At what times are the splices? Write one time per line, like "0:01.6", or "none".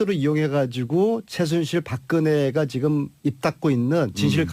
0:02.4